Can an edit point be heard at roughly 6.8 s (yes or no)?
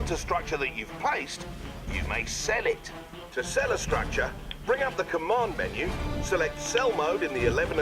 yes